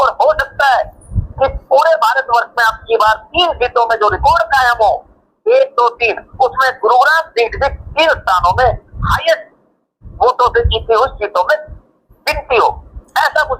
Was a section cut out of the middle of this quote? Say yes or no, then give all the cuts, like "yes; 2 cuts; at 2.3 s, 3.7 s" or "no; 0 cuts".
yes; 1 cut; at 9.1 s